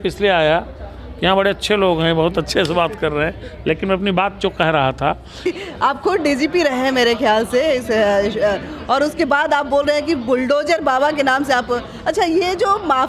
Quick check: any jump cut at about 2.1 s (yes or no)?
no